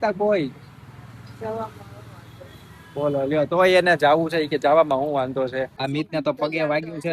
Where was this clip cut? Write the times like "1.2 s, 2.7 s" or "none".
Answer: 5.8 s